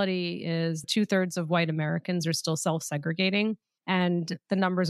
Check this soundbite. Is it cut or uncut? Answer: cut